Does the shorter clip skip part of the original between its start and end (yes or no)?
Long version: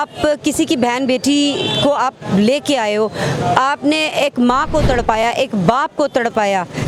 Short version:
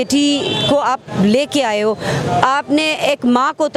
no